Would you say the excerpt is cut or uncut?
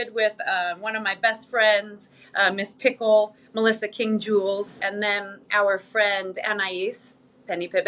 cut